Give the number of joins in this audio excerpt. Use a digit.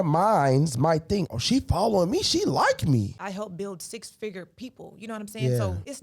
1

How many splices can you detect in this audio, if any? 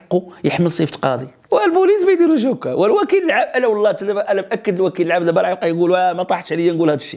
1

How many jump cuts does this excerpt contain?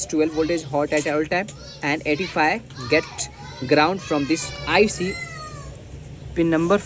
1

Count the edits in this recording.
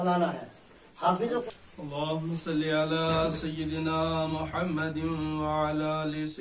1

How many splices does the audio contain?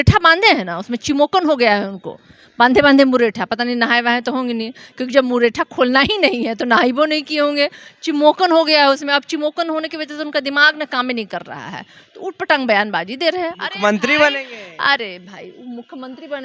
0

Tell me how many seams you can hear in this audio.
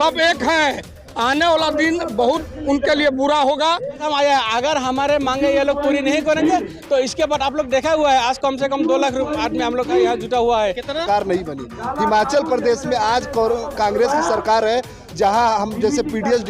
2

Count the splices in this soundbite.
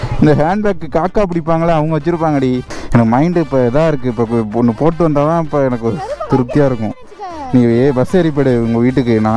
1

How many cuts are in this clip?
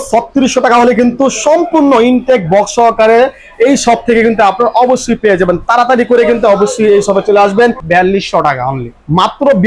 1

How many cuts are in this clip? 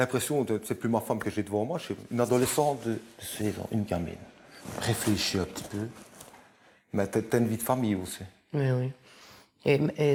0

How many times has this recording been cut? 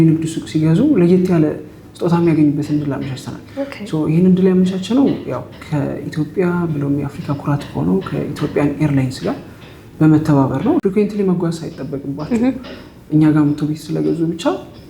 1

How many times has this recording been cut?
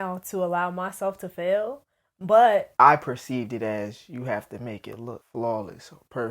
2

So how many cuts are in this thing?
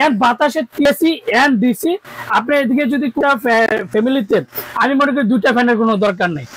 2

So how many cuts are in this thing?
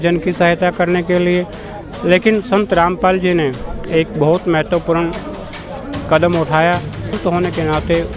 1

